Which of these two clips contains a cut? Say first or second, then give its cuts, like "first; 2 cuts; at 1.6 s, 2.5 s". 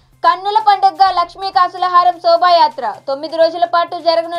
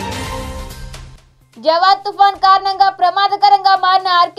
second; 1 cut; at 1.1 s